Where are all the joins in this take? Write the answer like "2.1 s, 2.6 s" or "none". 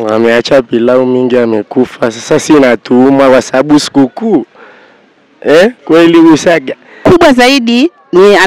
7.0 s